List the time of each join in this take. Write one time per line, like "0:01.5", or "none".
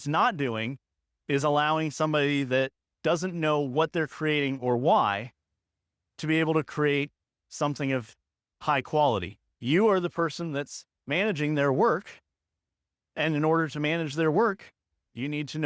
0:09.4